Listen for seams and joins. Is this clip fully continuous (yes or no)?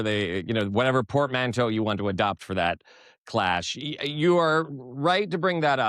yes